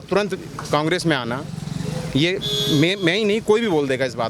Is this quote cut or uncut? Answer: uncut